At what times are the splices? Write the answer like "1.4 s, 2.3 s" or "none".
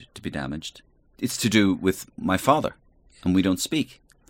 1.0 s, 2.2 s